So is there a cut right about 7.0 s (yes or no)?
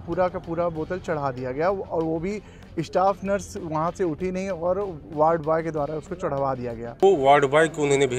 yes